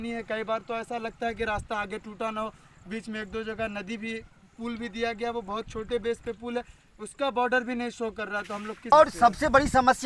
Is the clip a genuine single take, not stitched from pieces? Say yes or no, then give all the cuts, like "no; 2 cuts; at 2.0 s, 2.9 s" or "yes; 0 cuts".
no; 1 cut; at 8.9 s